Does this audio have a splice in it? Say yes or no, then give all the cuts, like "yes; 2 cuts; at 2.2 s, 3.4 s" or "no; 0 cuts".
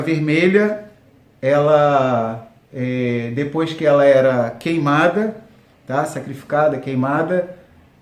no; 0 cuts